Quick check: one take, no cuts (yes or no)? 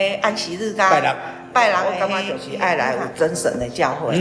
no